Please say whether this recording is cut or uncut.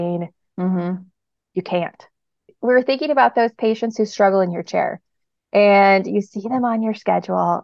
cut